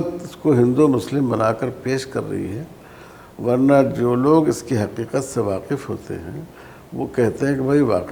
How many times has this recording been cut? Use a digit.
0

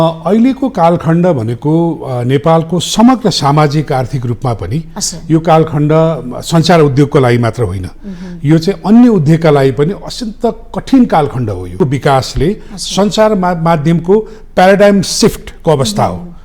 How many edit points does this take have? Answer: 1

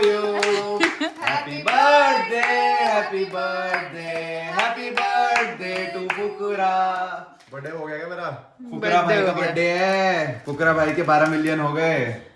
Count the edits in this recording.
1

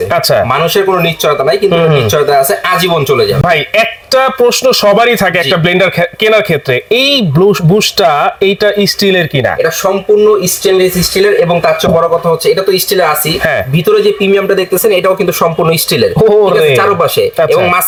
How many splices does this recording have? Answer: 0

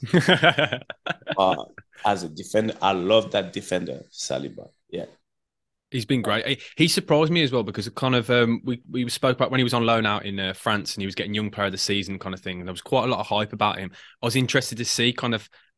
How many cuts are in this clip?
0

